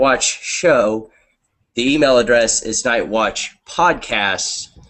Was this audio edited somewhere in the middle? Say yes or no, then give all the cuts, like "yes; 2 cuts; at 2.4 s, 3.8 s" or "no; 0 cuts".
yes; 1 cut; at 2.6 s